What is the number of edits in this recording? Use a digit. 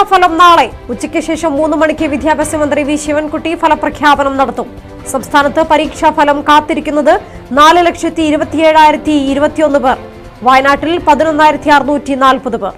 0